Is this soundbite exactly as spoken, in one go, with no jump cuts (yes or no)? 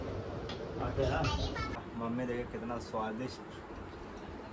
no